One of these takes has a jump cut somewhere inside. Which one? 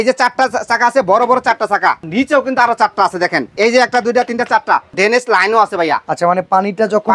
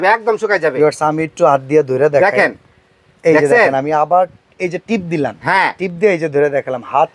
first; 3 cuts; at 2.1 s, 3.5 s, 4.9 s

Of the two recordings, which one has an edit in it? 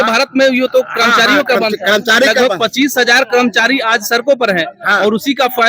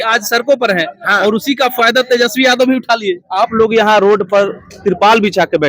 second; 1 cut; at 3.2 s

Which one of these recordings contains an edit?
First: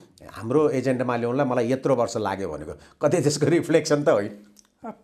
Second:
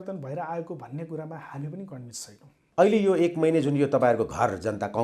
second; 1 cut; at 2.6 s

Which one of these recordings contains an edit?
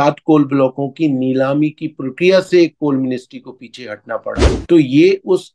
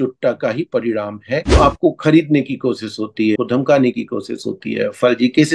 second; 2 cuts; at 1.5 s, 3.4 s

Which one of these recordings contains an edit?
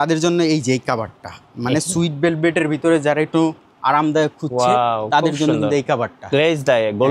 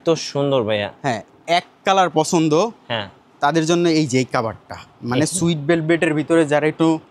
second; 1 cut; at 1.4 s

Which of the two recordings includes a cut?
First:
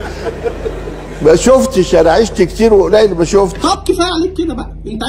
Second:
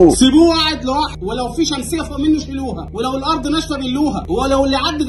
second; 3 cuts; at 1.2 s, 2.8 s, 4.2 s

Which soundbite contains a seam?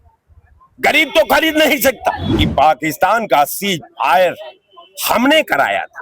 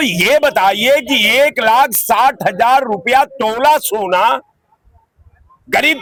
first; 1 cut; at 2.2 s

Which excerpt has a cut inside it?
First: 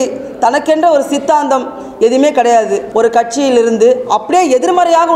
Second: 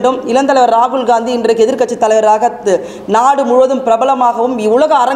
first; 1 cut; at 2.9 s

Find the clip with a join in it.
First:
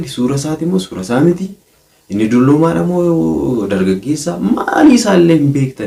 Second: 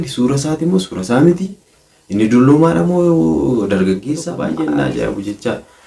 second; 1 cut; at 4.4 s

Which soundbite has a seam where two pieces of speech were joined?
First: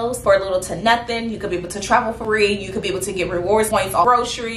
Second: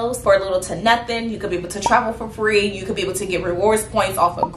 first; 2 cuts; at 2.2 s, 3.8 s

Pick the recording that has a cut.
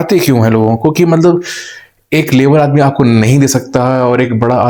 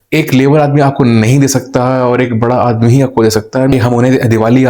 second; 1 cut; at 3.7 s

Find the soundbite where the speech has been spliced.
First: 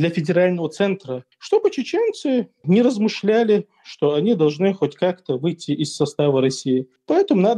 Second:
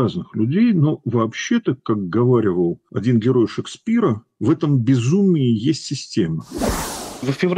second; 2 cuts; at 2.9 s, 6.7 s

